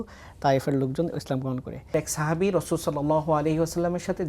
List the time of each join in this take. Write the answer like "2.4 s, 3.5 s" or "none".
1.9 s